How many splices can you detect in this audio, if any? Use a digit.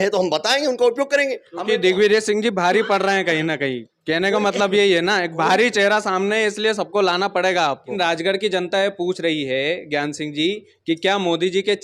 2